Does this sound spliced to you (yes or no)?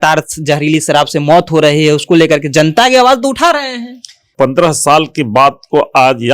yes